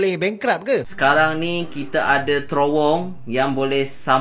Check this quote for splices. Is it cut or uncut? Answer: cut